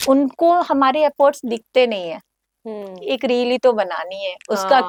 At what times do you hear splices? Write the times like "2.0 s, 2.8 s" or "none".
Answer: none